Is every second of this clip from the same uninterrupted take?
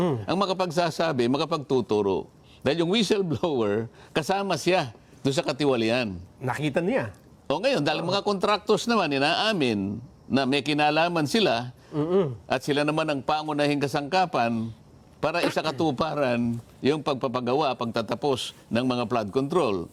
yes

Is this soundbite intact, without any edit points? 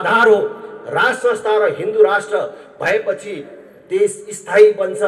yes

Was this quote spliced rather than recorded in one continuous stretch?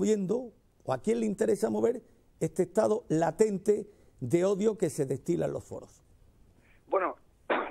yes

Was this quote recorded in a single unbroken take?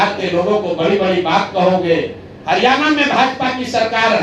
yes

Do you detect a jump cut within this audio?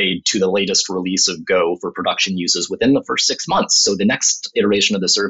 no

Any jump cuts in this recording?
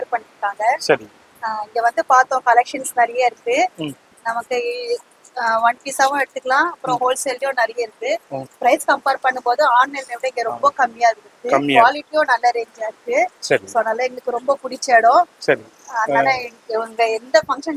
no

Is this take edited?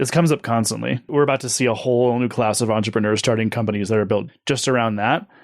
yes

